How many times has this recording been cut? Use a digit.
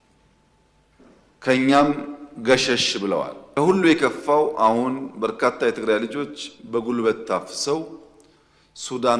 1